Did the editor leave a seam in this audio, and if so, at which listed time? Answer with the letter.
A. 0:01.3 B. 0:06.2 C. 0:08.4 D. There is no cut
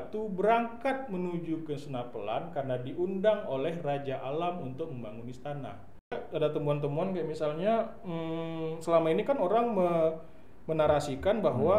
B